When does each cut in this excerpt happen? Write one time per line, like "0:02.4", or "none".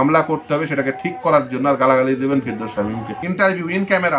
0:03.0